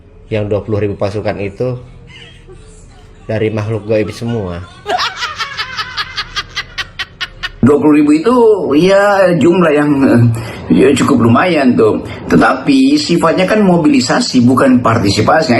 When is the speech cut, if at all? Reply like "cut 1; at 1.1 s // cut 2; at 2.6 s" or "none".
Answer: cut 1; at 7.6 s

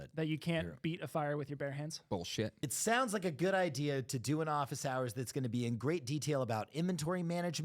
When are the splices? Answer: cut 1; at 2.6 s

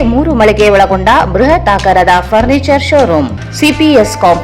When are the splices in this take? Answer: cut 1; at 3.0 s

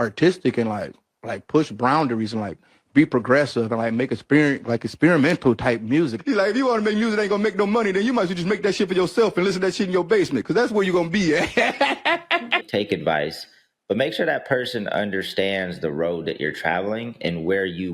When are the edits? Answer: cut 1; at 6.2 s // cut 2; at 12.7 s

